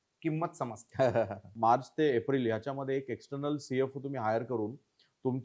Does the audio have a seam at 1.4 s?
yes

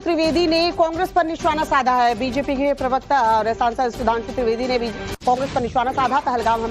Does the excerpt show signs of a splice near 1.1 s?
yes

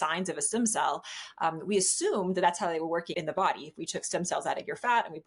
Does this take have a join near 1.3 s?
no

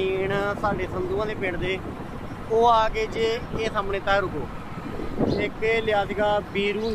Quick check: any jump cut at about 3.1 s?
no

